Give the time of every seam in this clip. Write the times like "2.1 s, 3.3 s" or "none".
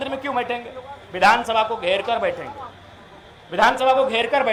none